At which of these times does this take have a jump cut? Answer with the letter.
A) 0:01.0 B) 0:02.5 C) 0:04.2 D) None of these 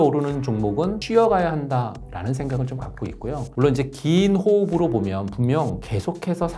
A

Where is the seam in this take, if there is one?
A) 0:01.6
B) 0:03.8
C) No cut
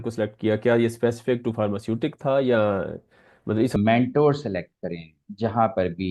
B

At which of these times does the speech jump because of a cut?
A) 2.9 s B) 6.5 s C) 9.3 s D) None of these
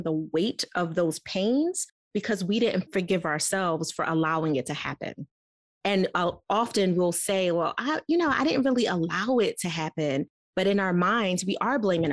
A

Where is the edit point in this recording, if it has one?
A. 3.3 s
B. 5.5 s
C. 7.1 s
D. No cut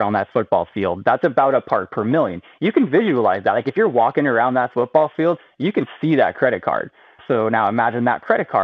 C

